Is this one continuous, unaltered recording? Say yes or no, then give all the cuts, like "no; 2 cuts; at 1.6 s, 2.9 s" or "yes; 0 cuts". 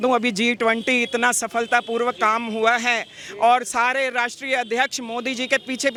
yes; 0 cuts